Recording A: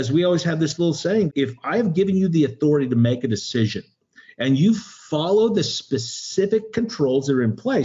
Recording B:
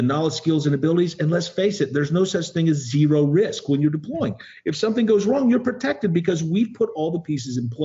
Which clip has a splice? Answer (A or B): A